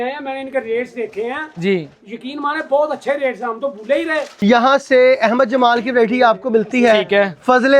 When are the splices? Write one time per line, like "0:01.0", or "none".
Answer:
0:04.3